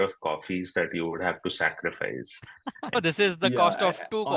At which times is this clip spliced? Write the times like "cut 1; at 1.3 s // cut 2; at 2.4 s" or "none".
cut 1; at 2.9 s